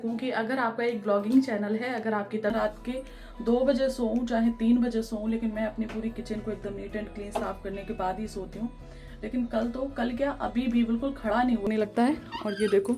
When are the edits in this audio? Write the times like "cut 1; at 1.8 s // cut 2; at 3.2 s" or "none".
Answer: cut 1; at 2.5 s // cut 2; at 11.6 s